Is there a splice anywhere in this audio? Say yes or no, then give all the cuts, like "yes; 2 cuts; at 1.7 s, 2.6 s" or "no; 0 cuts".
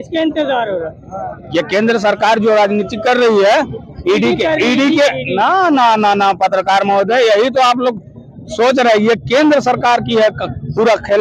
no; 0 cuts